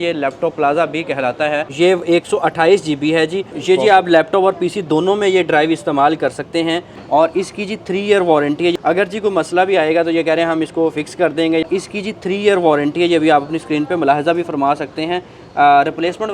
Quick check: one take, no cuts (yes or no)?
no